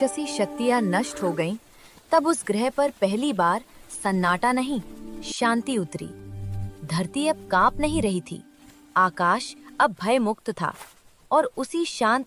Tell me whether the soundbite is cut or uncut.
uncut